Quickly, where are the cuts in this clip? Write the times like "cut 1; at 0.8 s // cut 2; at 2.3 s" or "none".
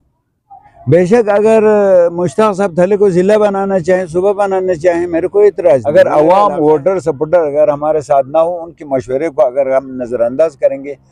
cut 1; at 5.9 s

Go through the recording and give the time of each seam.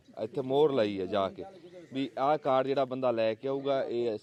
none

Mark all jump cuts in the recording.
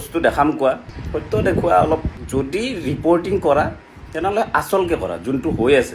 cut 1; at 0.9 s // cut 2; at 2.2 s

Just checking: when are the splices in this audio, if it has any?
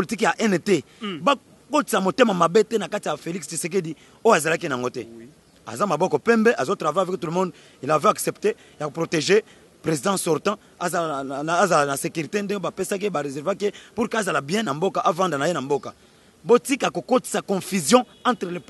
none

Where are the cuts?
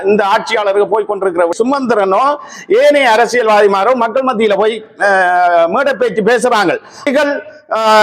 cut 1; at 1.5 s // cut 2; at 7.0 s

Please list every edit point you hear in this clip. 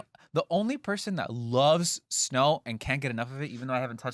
none

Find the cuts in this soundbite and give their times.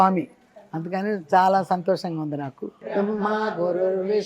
cut 1; at 2.7 s

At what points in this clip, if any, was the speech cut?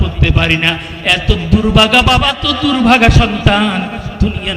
cut 1; at 2.4 s

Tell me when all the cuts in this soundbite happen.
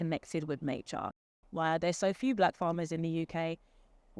cut 1; at 1.3 s

